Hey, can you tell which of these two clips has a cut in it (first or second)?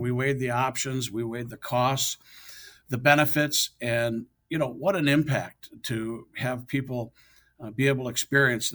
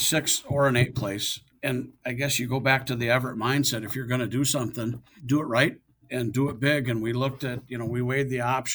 second